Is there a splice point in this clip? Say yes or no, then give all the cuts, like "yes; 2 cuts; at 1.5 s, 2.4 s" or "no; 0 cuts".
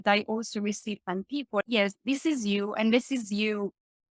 yes; 1 cut; at 1.6 s